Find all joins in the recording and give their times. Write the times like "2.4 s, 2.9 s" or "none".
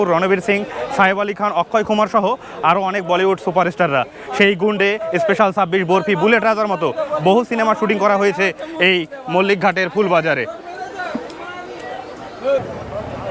none